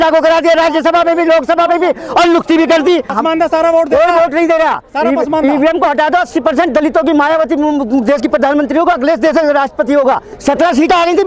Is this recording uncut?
no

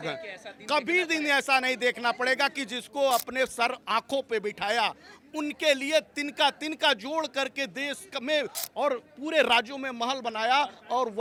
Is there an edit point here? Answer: no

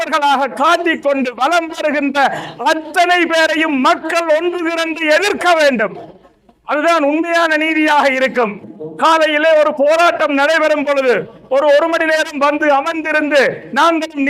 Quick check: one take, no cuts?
yes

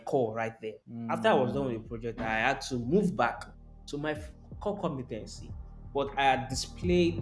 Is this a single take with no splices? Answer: yes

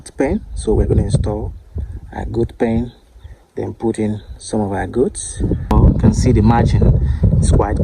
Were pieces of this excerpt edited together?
yes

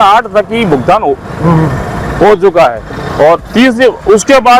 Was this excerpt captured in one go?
yes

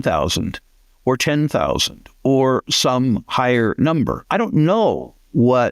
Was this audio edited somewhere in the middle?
yes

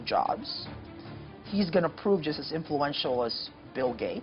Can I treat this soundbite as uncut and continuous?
yes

